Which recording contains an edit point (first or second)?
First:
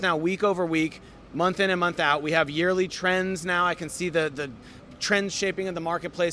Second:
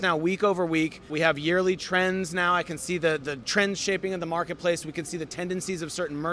second